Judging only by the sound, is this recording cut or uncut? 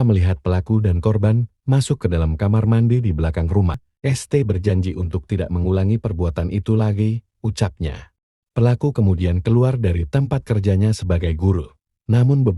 cut